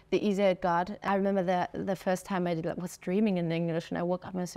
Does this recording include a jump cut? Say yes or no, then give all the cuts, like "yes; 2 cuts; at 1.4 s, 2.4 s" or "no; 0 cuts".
yes; 1 cut; at 1.0 s